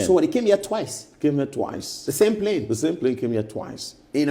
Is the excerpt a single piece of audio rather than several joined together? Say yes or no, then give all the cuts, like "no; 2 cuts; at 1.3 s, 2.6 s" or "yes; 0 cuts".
yes; 0 cuts